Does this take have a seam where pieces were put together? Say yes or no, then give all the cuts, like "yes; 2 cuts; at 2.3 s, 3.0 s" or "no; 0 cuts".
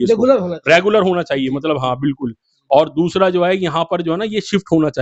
no; 0 cuts